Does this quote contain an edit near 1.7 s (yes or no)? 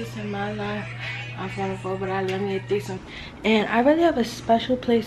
no